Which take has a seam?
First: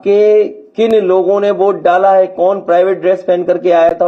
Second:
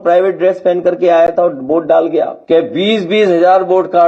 second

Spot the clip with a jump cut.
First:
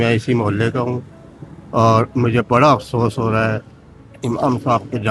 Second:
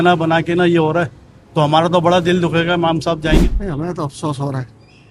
second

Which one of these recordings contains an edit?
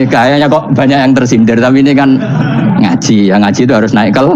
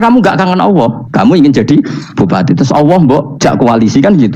second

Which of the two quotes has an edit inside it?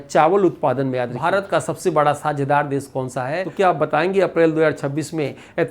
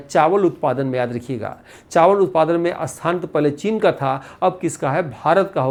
first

